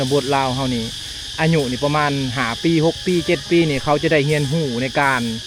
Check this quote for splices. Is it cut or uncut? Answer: uncut